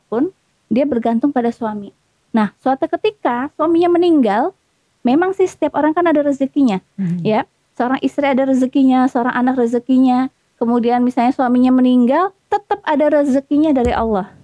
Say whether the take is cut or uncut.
uncut